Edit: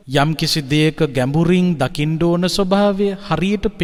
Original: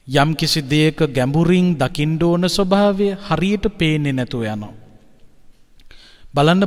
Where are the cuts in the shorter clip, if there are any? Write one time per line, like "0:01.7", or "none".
none